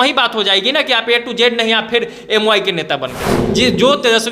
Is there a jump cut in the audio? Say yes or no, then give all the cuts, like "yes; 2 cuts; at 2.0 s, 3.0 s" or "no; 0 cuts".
yes; 1 cut; at 3.4 s